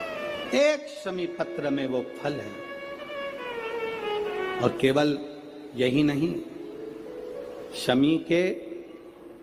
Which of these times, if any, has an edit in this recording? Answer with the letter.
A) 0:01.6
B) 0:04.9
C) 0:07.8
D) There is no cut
D